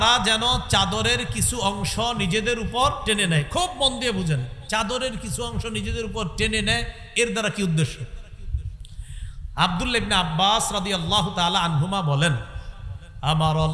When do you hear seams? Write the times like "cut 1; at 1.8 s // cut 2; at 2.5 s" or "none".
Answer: none